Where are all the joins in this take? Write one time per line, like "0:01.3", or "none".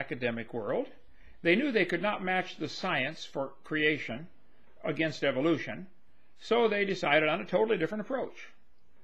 0:04.0